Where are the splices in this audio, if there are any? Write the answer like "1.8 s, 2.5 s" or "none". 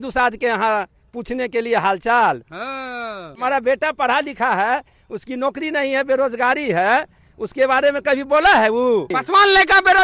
3.4 s, 9.2 s